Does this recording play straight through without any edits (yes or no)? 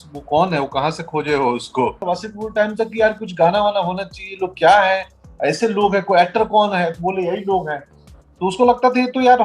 no